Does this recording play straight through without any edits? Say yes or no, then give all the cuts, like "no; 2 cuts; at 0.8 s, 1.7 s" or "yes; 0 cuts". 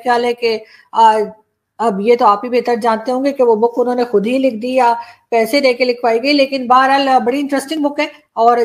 yes; 0 cuts